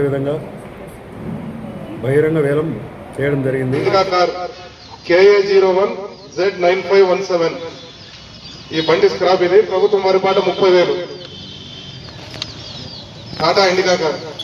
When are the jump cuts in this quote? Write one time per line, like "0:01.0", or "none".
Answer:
0:03.8